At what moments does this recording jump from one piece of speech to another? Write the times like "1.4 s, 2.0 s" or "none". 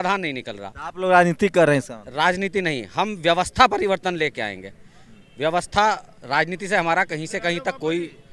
none